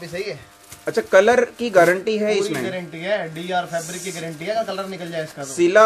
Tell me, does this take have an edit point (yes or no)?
no